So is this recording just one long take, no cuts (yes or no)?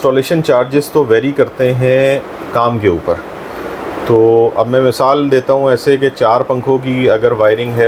yes